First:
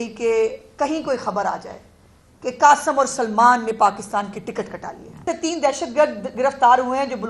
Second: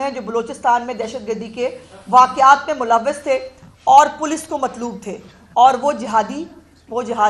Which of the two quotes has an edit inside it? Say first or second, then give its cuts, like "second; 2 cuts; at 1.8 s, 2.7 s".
first; 1 cut; at 5.2 s